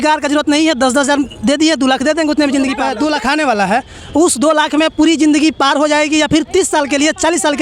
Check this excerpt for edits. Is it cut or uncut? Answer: cut